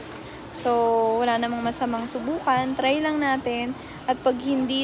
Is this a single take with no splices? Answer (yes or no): yes